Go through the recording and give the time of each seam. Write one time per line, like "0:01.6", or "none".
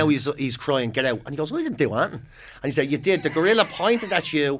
none